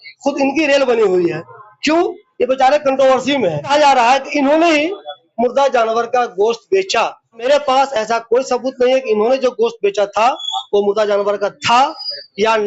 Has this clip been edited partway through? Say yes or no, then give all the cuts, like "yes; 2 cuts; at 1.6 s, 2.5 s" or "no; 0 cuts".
no; 0 cuts